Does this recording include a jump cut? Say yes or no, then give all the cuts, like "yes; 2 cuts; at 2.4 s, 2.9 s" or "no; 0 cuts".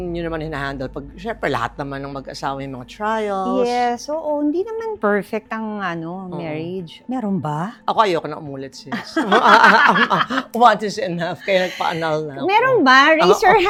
no; 0 cuts